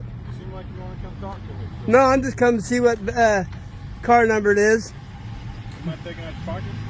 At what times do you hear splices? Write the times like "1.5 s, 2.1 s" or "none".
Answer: none